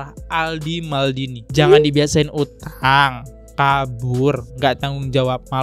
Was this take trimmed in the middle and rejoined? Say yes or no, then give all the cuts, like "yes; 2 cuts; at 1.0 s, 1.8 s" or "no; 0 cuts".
yes; 1 cut; at 1.4 s